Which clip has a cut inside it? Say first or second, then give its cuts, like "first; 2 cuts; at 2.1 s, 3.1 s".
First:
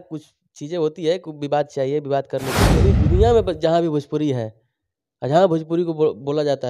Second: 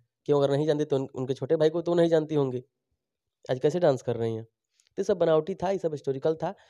first; 1 cut; at 2.8 s